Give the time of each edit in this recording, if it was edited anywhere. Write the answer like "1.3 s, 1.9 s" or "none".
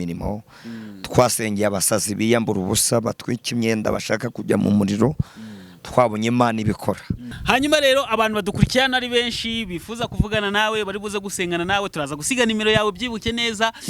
7.3 s